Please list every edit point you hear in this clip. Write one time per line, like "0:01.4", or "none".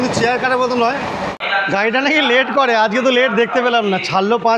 0:01.4